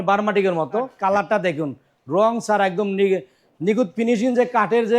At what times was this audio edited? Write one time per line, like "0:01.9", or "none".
0:00.9